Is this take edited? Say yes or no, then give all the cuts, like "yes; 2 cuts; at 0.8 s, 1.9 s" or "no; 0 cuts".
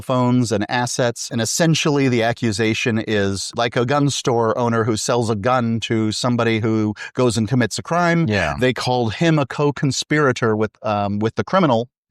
yes; 2 cuts; at 1.2 s, 3.4 s